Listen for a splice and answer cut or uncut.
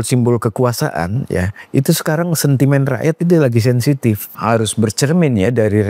cut